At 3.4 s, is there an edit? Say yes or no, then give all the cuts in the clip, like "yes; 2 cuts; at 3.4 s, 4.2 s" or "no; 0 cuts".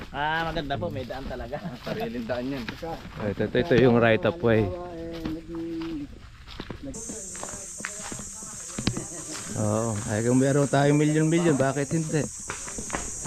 no; 1 cut; at 6.9 s